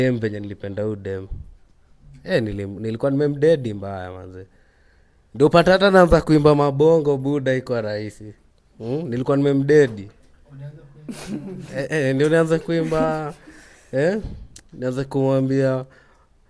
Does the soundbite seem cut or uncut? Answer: uncut